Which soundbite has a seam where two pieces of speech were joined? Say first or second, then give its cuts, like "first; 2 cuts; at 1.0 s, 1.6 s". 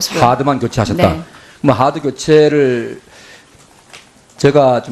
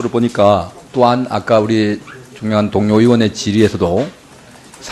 first; 1 cut; at 1.3 s